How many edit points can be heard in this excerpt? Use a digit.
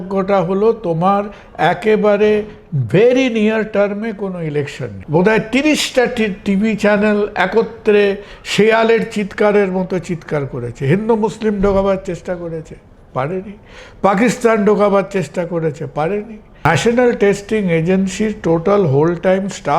2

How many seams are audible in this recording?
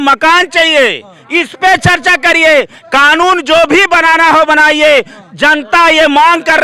0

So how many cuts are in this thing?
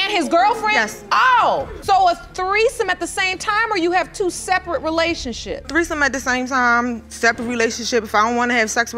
2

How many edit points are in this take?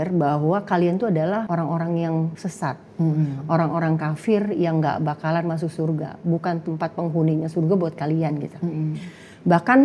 2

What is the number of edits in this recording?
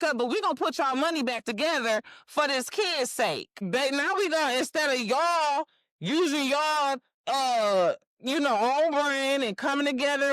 1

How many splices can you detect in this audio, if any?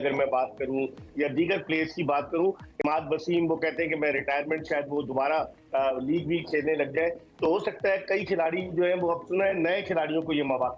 0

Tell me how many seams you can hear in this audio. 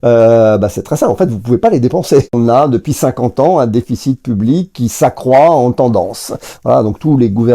1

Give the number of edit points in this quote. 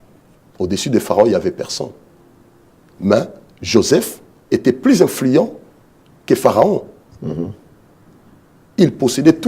0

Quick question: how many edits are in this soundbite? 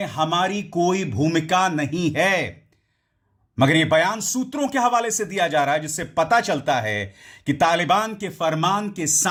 0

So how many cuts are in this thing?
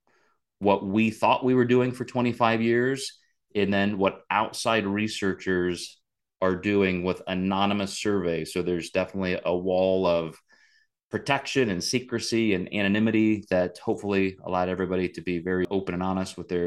1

